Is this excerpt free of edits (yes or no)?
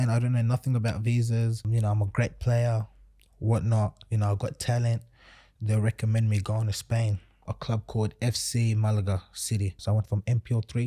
no